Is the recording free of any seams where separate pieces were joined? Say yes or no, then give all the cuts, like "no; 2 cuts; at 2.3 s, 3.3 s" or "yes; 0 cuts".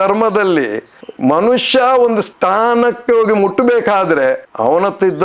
no; 1 cut; at 2.3 s